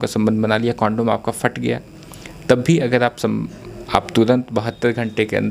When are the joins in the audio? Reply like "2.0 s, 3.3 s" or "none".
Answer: none